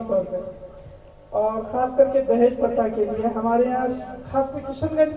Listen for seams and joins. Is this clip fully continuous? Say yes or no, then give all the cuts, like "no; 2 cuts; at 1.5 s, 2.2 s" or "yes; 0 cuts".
yes; 0 cuts